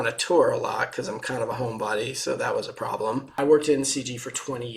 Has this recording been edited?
yes; 1 cut; at 3.4 s

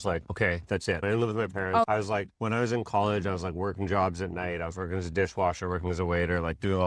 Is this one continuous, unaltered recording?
yes; 0 cuts

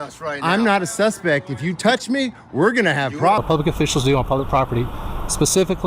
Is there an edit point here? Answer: yes; 1 cut; at 3.4 s

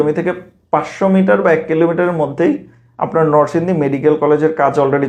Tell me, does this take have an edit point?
no; 0 cuts

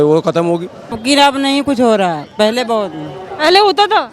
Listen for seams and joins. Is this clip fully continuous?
no; 1 cut; at 1.0 s

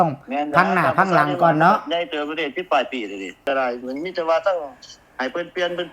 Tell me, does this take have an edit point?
yes; 1 cut; at 3.5 s

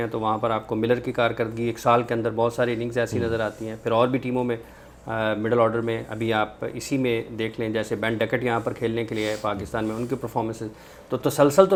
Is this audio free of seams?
yes; 0 cuts

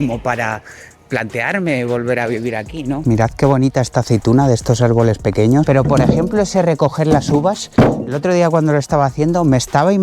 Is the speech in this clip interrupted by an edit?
yes; 2 cuts; at 3.0 s, 5.7 s

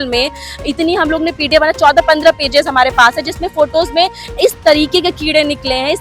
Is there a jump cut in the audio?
no; 0 cuts

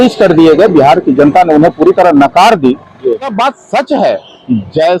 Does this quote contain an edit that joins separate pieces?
yes; 1 cut; at 3.3 s

